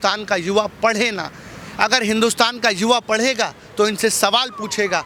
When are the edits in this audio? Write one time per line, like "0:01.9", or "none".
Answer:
none